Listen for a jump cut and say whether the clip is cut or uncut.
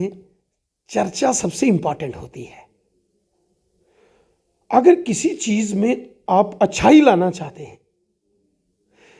uncut